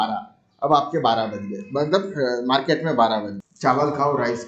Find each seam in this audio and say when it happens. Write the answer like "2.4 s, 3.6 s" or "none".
3.3 s

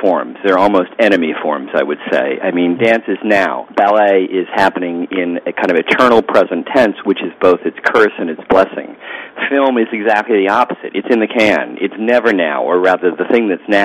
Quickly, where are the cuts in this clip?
3.7 s, 7.0 s

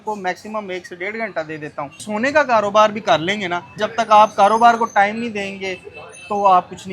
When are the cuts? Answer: 2.0 s, 3.7 s

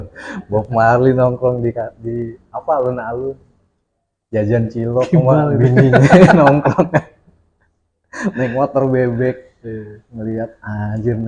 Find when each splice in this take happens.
none

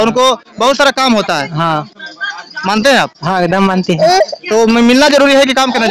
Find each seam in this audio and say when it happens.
none

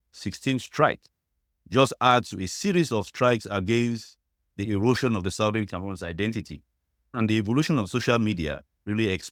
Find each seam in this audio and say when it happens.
none

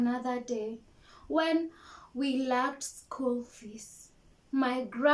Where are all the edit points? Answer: none

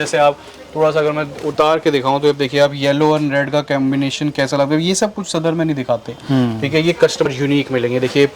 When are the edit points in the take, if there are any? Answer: 7.3 s

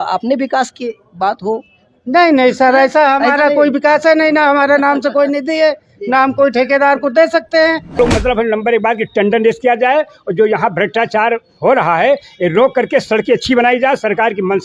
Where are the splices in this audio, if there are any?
8.0 s

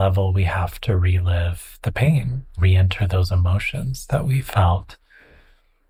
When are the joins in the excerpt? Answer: none

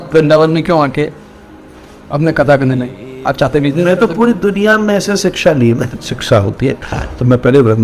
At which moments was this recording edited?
5.9 s

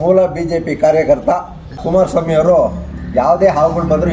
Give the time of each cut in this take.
1.8 s

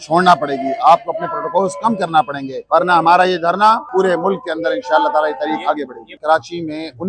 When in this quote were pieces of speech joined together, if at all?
2.5 s, 3.9 s, 6.1 s

